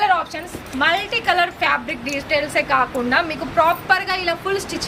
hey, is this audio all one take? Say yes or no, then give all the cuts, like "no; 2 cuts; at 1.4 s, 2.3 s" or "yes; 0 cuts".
yes; 0 cuts